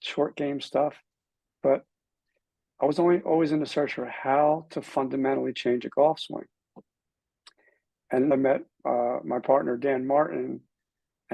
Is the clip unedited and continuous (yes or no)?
no